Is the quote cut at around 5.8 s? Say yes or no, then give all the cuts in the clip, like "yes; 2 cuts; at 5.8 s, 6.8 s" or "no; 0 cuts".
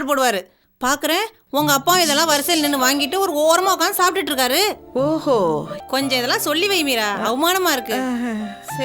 yes; 1 cut; at 5.8 s